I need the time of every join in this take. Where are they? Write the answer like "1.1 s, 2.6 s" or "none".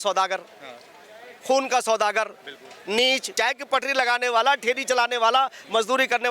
3.3 s